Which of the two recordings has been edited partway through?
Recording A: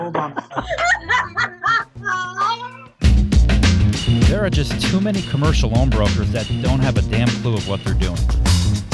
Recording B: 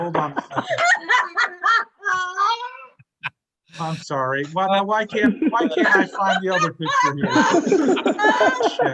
A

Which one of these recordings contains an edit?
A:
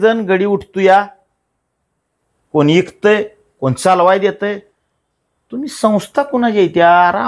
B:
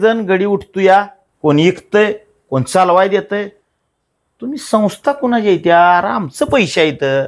B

